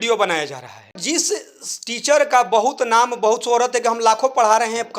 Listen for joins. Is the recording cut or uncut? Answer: cut